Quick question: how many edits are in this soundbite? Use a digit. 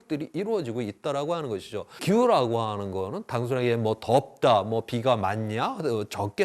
1